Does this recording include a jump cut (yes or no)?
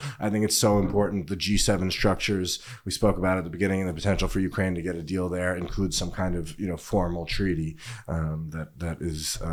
no